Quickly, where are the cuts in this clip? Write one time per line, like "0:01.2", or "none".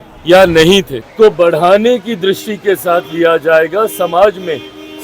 0:01.0